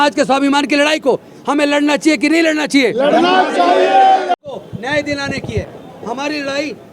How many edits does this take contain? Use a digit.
1